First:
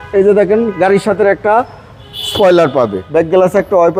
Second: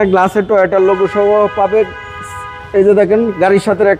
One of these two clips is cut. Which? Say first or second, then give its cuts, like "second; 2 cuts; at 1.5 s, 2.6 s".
first; 1 cut; at 3.0 s